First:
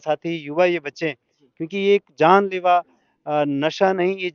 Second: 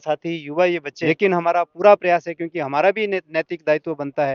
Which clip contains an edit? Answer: second; 1 cut; at 0.9 s

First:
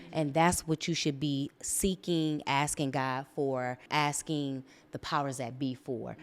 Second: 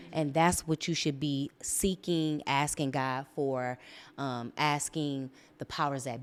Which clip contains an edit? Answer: first; 1 cut; at 3.8 s

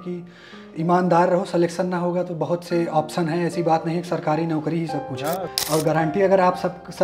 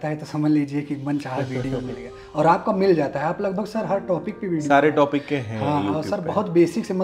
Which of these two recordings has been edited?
first; 1 cut; at 5.5 s

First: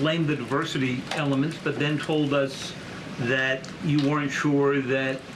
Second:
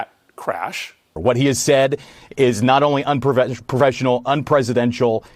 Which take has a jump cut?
second; 1 cut; at 1.1 s

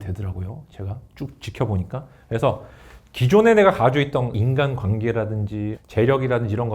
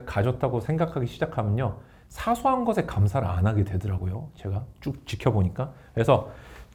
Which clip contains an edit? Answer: first; 2 cuts; at 4.3 s, 5.8 s

